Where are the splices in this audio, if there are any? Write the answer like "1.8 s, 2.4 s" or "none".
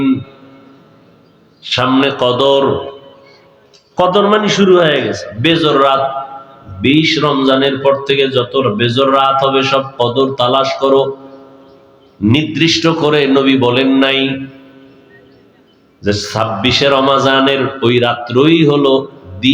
none